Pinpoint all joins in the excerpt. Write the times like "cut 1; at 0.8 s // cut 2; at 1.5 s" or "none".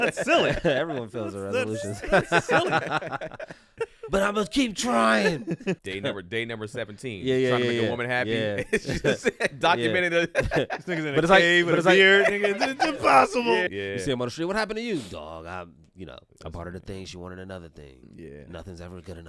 cut 1; at 5.8 s